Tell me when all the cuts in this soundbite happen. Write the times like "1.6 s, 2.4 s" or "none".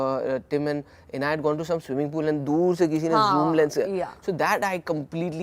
none